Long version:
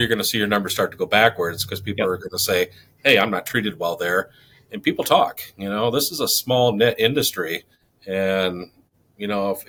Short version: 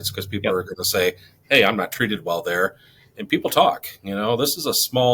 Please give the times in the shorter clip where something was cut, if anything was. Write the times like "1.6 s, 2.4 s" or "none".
none